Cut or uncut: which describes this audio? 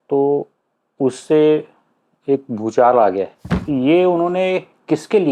cut